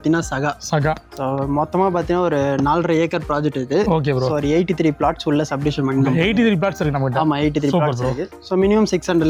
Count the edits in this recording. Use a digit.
0